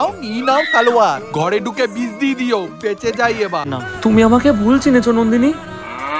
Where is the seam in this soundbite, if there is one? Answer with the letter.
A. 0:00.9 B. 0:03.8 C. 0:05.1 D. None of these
B